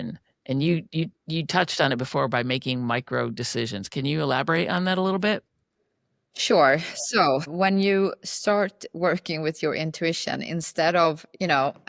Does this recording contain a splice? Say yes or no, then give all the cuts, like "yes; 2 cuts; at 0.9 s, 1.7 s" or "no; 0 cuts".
yes; 1 cut; at 7.5 s